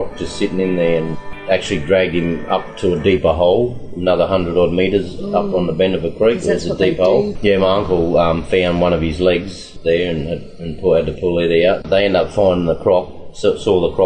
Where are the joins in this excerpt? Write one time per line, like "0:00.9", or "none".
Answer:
0:01.1
0:07.3
0:09.6
0:11.8